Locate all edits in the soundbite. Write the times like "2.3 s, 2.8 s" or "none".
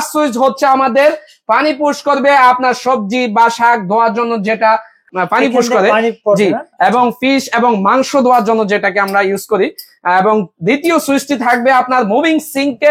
5.0 s